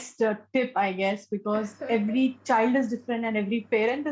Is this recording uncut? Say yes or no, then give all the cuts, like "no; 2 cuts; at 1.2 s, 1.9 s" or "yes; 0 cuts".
yes; 0 cuts